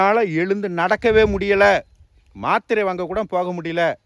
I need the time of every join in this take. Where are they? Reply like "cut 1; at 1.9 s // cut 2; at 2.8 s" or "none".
none